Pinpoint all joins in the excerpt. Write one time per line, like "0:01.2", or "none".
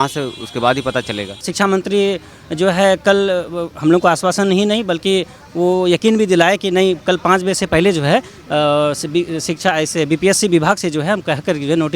0:01.5